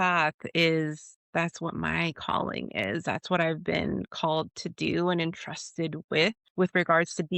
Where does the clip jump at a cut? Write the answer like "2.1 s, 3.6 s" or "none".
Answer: 6.4 s